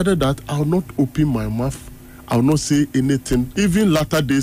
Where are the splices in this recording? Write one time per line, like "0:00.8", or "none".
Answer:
0:03.3